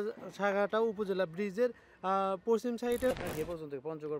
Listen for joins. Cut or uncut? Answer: cut